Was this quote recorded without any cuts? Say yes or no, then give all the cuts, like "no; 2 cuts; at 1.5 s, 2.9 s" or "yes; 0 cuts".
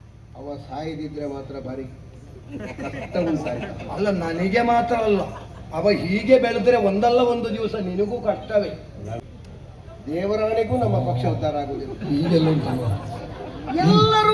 no; 1 cut; at 9.2 s